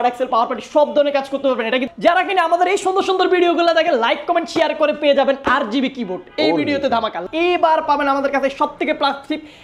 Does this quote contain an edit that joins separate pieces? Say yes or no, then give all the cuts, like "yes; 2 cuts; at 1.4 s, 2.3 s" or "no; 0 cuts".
yes; 2 cuts; at 1.9 s, 7.2 s